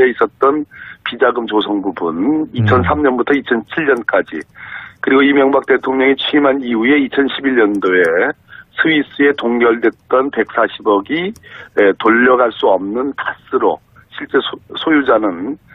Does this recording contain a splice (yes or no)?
yes